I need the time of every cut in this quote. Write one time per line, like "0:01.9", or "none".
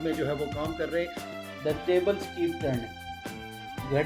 0:01.2